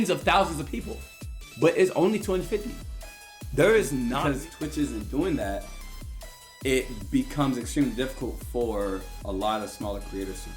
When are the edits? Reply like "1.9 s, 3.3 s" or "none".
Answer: 4.2 s